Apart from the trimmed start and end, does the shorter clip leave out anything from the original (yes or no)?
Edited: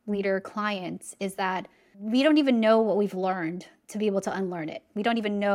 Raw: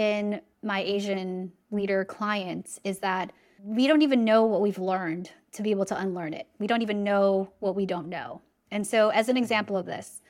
no